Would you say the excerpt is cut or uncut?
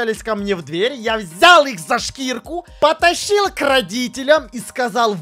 uncut